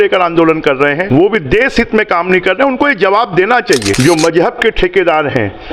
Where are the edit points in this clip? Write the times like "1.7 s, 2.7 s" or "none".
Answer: 1.0 s, 4.0 s